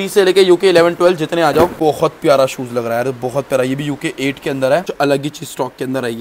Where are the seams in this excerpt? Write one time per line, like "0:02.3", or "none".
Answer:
0:01.7
0:04.9